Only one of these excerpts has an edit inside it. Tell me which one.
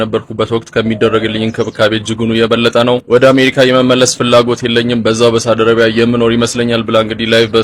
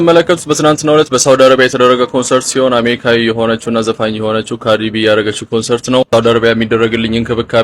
second; 1 cut; at 6.1 s

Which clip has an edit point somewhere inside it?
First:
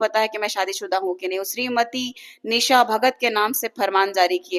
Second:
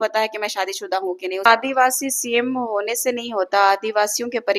second; 1 cut; at 1.5 s

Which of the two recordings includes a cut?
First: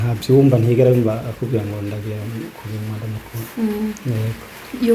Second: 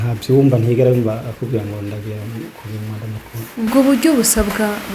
second; 1 cut; at 3.7 s

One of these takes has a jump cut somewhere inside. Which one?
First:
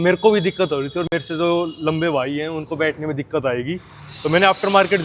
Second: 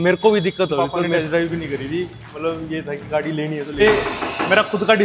second; 2 cuts; at 1.0 s, 3.8 s

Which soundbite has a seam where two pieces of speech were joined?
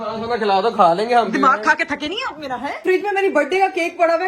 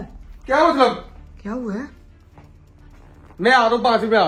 first; 1 cut; at 2.8 s

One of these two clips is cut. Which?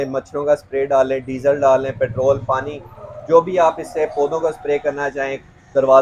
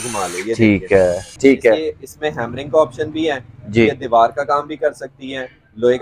second; 1 cut; at 1.3 s

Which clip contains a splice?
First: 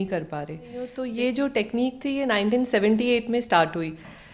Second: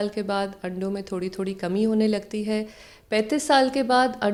first; 1 cut; at 1.0 s

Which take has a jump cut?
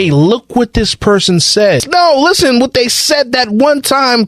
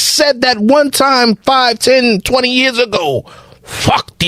first; 1 cut; at 1.9 s

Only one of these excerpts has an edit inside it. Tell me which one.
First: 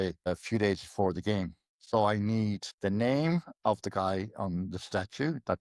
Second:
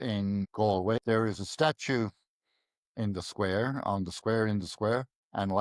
second; 1 cut; at 1.0 s

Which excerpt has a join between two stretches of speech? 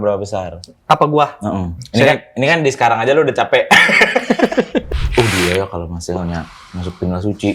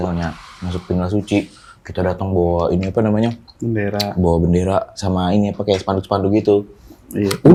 first; 2 cuts; at 1.8 s, 4.9 s

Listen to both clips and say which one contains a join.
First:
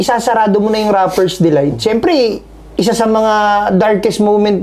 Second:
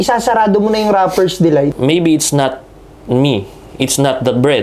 second; 1 cut; at 1.8 s

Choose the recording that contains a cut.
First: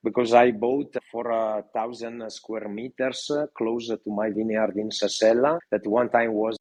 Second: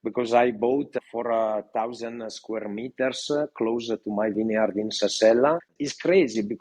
second; 1 cut; at 5.6 s

